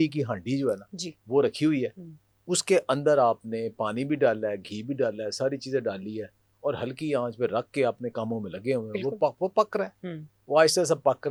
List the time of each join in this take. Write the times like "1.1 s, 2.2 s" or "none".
none

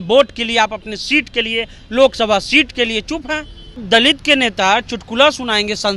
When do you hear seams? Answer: 3.8 s

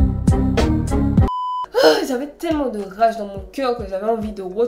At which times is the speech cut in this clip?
1.3 s

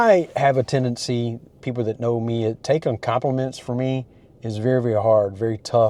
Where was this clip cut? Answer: none

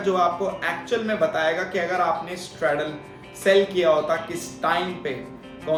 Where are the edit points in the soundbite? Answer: none

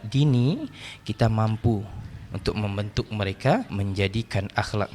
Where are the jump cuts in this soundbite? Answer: 3.7 s

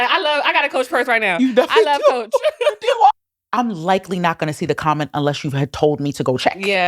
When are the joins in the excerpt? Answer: 3.2 s

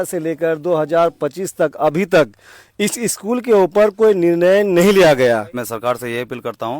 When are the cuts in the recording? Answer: 5.7 s

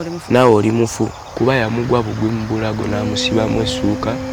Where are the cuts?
1.3 s

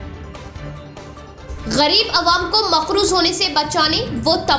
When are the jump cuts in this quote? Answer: 1.0 s

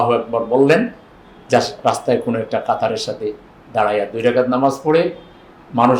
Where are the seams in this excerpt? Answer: none

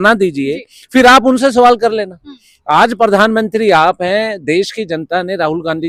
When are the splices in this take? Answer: none

